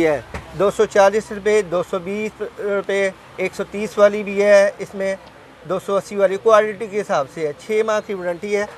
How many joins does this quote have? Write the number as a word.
zero